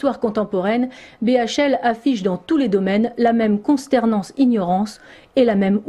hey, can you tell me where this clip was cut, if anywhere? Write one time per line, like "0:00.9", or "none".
0:03.6

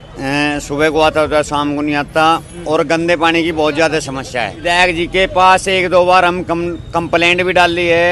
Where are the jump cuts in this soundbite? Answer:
0:04.6

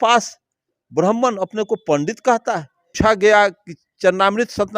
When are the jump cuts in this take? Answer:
0:02.8

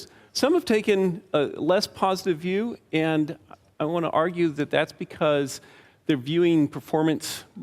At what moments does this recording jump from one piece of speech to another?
0:02.2

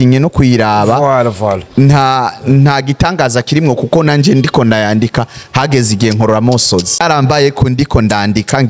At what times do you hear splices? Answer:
0:07.0

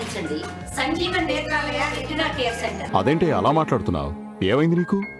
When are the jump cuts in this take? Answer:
0:02.8

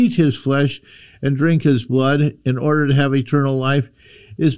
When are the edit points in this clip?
none

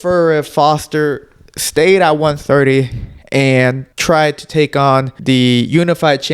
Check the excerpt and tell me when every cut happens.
0:03.9
0:05.1

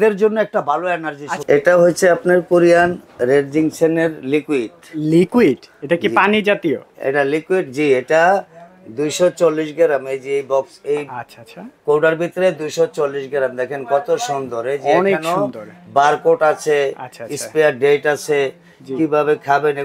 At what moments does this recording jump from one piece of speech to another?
0:01.4

